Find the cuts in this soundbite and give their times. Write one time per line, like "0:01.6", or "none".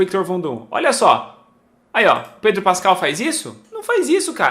none